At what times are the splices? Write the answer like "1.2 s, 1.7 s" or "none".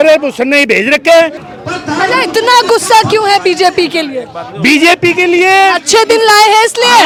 none